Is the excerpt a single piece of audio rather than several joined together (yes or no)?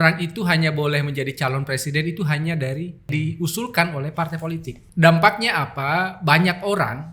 no